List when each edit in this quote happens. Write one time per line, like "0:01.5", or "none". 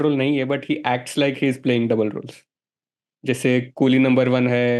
none